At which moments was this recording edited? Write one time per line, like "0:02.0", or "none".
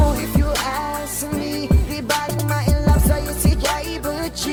none